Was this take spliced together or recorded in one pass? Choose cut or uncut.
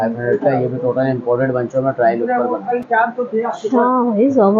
uncut